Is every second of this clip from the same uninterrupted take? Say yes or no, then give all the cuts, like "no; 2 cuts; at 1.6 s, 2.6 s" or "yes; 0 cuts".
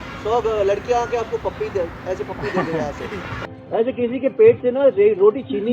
no; 1 cut; at 3.5 s